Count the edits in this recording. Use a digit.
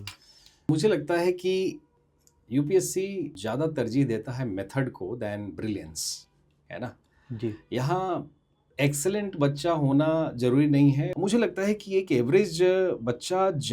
4